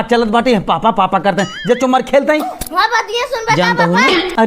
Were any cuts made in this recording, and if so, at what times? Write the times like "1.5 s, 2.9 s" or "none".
none